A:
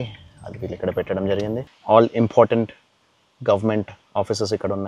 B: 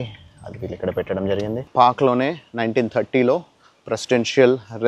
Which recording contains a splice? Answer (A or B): B